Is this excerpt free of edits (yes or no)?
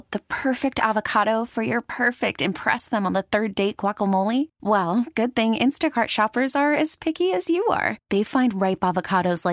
yes